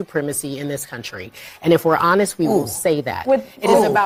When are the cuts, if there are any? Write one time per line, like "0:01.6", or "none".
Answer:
none